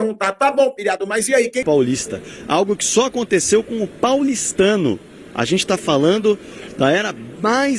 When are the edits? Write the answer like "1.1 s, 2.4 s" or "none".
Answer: 1.6 s